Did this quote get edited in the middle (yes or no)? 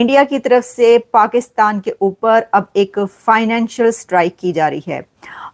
no